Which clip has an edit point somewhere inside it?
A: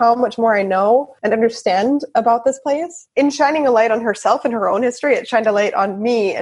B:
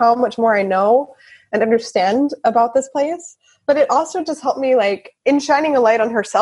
A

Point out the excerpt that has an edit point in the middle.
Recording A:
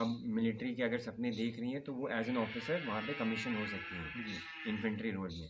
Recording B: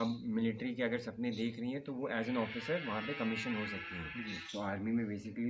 B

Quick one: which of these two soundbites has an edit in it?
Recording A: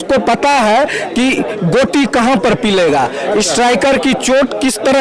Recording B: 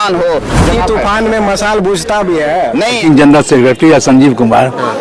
B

